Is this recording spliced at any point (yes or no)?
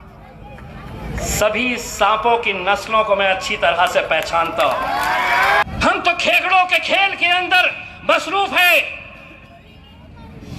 yes